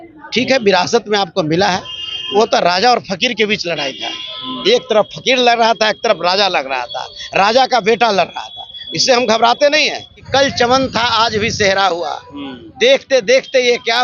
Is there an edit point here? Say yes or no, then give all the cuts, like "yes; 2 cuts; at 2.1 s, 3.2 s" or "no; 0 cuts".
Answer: yes; 1 cut; at 10.2 s